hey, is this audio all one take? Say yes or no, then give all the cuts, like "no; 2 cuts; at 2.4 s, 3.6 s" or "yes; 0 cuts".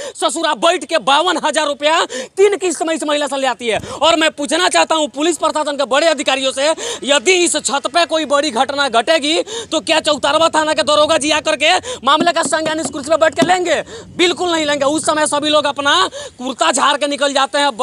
yes; 0 cuts